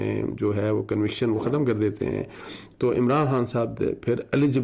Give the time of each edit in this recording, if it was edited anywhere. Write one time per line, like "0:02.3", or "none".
none